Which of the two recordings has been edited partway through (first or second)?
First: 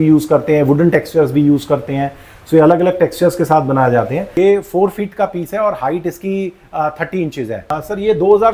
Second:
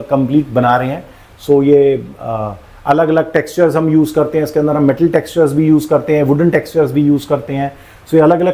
first